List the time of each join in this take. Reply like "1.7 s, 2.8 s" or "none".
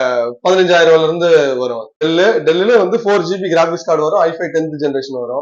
2.0 s